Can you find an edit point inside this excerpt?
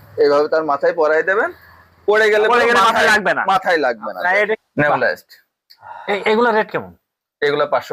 yes; 1 cut; at 4.6 s

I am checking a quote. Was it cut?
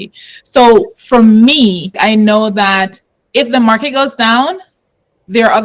yes; 1 cut; at 1.9 s

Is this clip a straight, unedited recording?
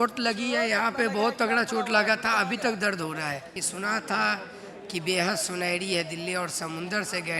no; 1 cut; at 3.6 s

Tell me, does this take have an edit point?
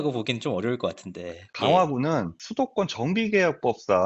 yes; 1 cut; at 1.5 s

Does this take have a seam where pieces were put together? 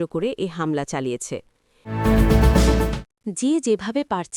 yes; 2 cuts; at 1.8 s, 3.0 s

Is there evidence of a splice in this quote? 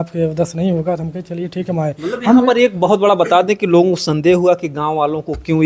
no; 0 cuts

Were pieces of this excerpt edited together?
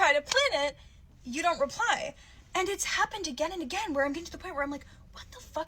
yes; 1 cut; at 2.9 s

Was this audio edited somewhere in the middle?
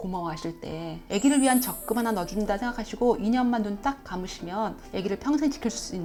no; 0 cuts

